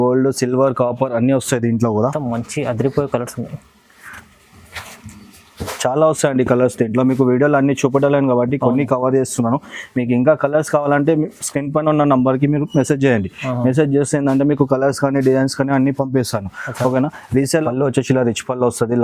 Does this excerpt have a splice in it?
yes; 2 cuts; at 2.1 s, 17.6 s

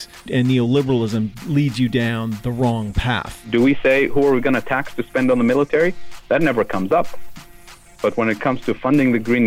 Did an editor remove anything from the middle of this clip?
yes; 1 cut; at 3.3 s

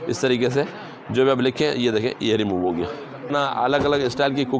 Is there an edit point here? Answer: yes; 1 cut; at 3.3 s

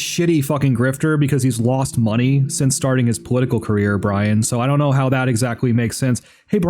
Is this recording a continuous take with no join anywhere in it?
yes; 0 cuts

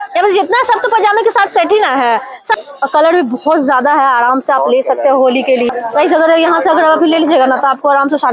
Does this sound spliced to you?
yes; 2 cuts; at 2.4 s, 5.7 s

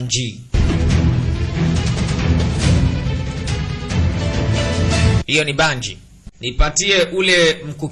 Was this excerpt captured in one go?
no; 1 cut; at 6.4 s

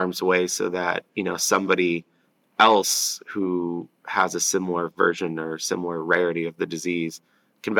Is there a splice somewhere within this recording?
no; 0 cuts

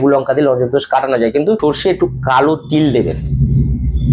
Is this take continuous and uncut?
no; 1 cut; at 1.6 s

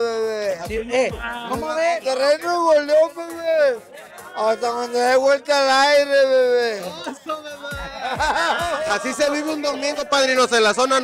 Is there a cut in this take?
no; 0 cuts

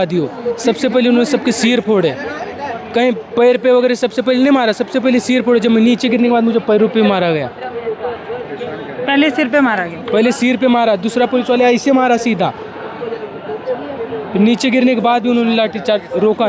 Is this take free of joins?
yes; 0 cuts

